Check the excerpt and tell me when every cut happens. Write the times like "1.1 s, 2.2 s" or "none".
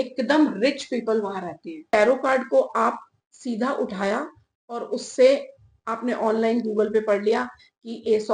1.9 s